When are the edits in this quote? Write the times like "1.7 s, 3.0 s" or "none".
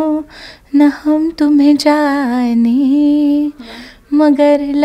none